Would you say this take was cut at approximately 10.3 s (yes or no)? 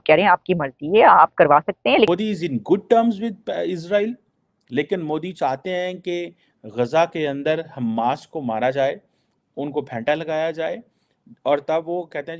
no